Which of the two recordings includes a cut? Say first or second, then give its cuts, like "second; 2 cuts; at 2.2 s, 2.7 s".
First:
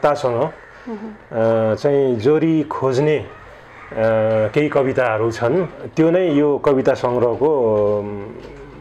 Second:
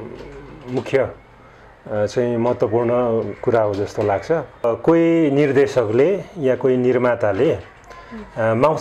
second; 1 cut; at 4.6 s